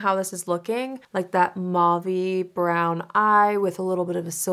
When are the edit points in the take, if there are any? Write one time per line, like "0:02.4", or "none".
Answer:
0:01.0

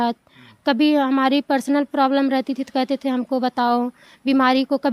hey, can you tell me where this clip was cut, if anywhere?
none

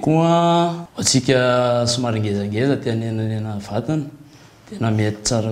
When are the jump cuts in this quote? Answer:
0:00.9

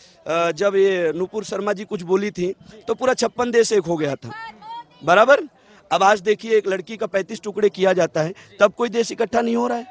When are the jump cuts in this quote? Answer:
none

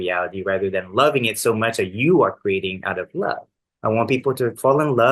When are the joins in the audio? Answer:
0:03.6

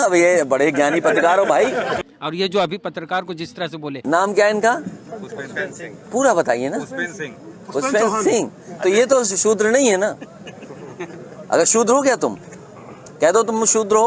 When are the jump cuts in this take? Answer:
0:01.9
0:04.0

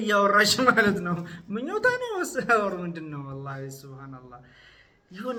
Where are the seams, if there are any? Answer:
none

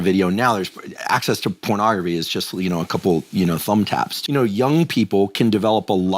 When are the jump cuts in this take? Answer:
0:04.1

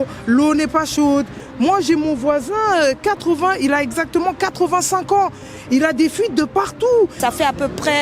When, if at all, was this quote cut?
0:01.4
0:07.2

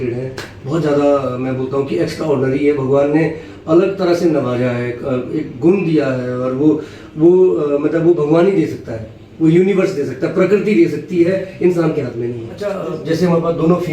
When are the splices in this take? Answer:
0:12.7

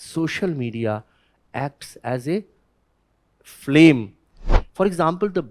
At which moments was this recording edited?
0:04.6

